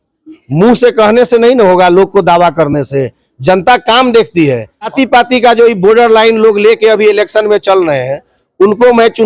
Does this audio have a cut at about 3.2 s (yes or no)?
no